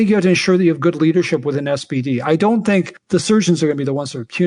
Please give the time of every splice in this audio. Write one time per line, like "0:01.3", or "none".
0:03.0